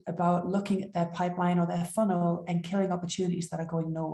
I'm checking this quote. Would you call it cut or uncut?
uncut